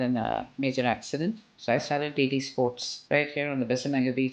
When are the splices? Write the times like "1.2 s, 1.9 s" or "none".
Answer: 1.5 s, 2.9 s